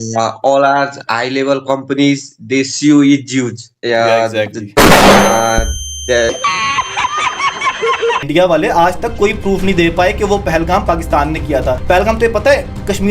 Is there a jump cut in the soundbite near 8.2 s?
yes; 1 cut; at 8.2 s

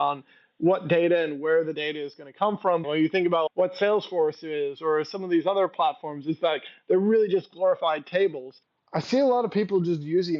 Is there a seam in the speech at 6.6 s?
no; 2 cuts; at 2.8 s, 8.8 s

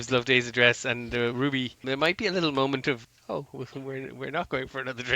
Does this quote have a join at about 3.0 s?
yes; 2 cuts; at 1.8 s, 3.0 s

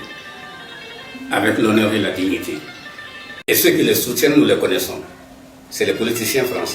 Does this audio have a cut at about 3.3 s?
yes; 1 cut; at 3.3 s

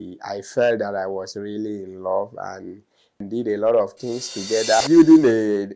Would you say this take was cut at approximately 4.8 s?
yes; 2 cuts; at 3.2 s, 4.8 s

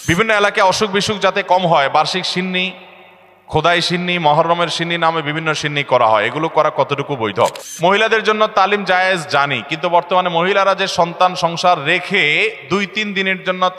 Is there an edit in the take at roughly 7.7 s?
yes; 1 cut; at 7.7 s

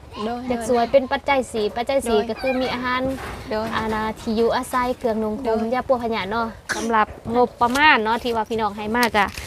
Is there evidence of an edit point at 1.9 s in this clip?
no; 1 cut; at 6.7 s

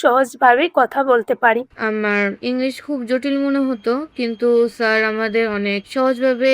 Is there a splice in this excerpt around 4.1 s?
no; 1 cut; at 1.7 s

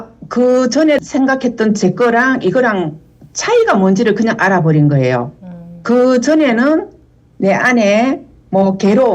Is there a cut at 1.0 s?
yes; 1 cut; at 1.0 s

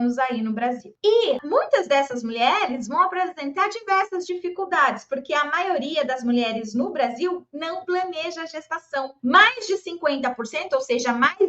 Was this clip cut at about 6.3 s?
no; 3 cuts; at 0.9 s, 1.4 s, 9.1 s

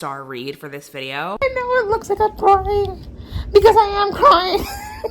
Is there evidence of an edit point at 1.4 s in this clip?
yes; 1 cut; at 1.4 s

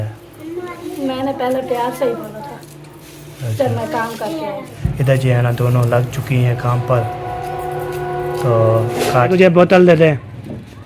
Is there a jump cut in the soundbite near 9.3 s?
yes; 2 cuts; at 4.7 s, 9.3 s

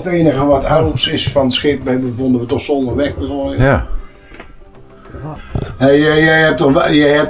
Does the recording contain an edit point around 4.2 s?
no; 1 cut; at 5.4 s

